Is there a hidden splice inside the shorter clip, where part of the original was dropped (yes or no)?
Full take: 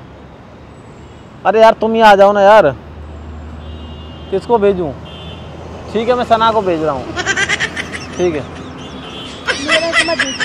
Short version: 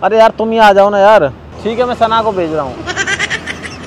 yes